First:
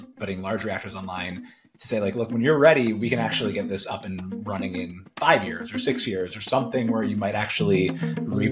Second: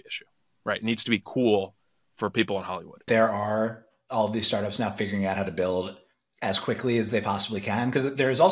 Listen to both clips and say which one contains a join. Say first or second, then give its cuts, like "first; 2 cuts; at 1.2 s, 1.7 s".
second; 1 cut; at 3.0 s